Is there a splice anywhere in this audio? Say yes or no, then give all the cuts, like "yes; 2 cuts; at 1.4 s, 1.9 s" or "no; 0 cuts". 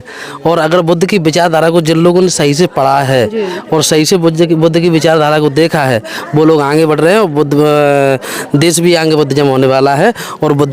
no; 0 cuts